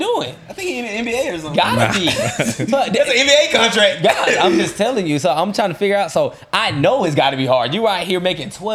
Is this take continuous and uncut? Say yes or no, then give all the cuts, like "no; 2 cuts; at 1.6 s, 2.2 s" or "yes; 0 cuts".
yes; 0 cuts